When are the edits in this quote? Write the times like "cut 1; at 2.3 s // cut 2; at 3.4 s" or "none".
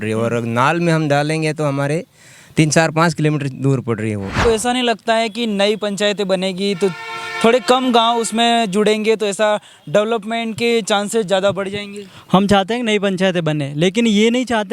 cut 1; at 4.4 s